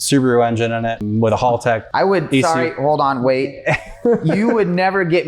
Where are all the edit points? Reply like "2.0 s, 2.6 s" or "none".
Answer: 1.0 s, 1.9 s